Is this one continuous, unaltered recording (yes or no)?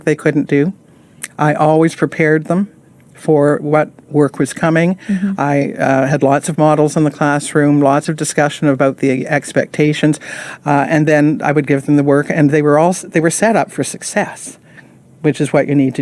yes